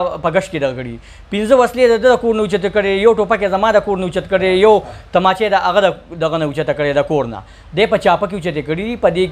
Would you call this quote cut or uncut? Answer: uncut